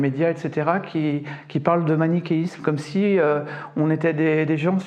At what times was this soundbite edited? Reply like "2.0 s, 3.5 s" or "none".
none